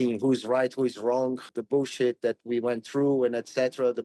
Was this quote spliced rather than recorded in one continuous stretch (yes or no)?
yes